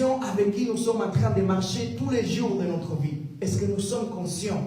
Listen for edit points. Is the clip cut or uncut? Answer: cut